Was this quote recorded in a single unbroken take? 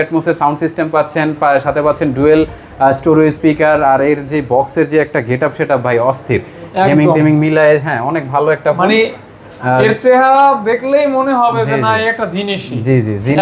yes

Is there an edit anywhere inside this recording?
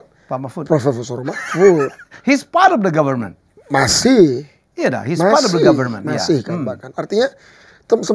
no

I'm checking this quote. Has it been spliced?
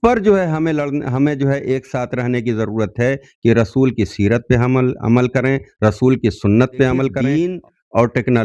yes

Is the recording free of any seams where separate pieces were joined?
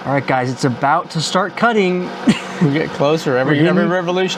yes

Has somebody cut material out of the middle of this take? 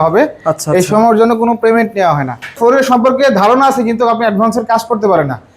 yes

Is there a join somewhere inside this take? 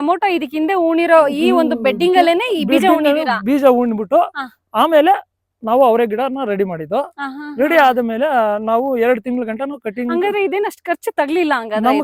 no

